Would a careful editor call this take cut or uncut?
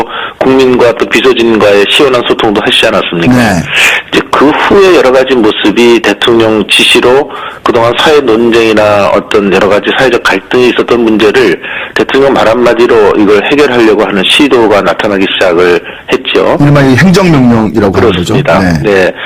cut